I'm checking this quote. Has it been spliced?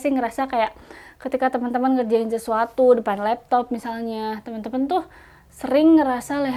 no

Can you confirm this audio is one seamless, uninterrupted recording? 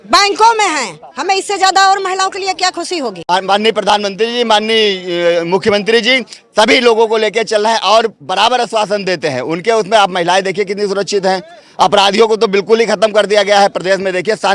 no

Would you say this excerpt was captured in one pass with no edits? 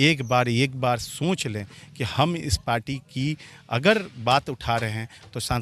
yes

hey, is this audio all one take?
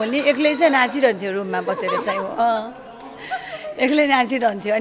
yes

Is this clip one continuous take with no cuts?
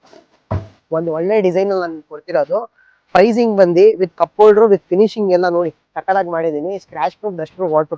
yes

